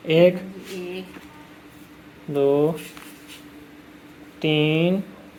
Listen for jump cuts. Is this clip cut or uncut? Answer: uncut